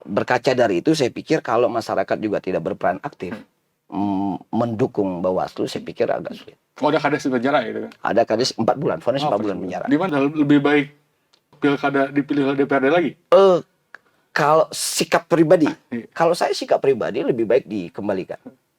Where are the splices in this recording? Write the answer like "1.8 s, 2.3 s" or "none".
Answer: 10.1 s